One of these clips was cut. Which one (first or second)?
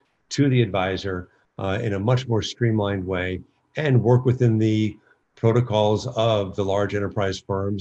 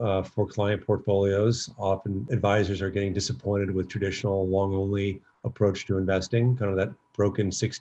second